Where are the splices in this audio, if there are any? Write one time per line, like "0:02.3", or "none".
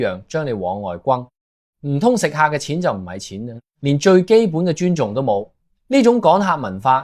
none